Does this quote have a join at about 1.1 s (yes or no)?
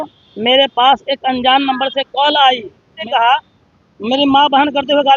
no